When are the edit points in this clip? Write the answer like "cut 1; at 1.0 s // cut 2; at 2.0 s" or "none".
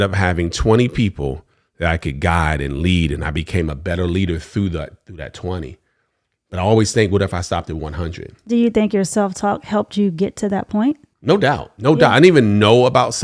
cut 1; at 11.1 s